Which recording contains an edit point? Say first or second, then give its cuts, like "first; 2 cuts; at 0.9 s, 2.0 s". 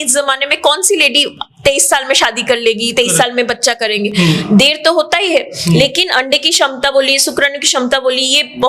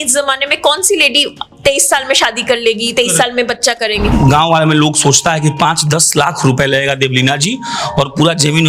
second; 1 cut; at 4.1 s